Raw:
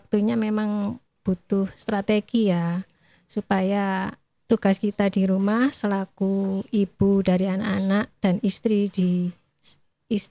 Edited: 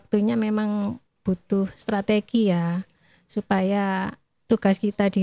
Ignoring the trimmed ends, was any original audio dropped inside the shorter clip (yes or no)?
no